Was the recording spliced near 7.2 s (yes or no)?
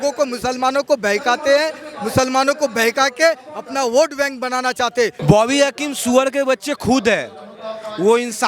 no